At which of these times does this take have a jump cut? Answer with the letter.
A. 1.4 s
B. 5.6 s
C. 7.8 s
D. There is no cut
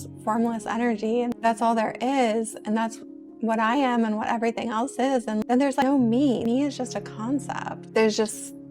C